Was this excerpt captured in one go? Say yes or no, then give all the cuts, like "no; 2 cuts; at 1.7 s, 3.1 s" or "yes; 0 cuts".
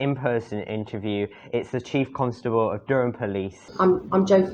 no; 1 cut; at 3.6 s